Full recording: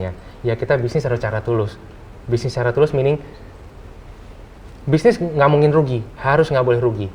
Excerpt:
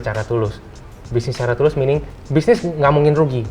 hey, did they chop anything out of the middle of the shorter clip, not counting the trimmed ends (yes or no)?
yes